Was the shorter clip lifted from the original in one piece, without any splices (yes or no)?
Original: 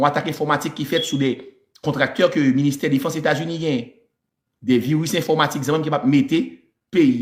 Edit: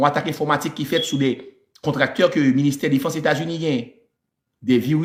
yes